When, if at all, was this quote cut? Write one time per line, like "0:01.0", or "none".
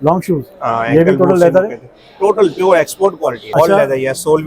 0:03.4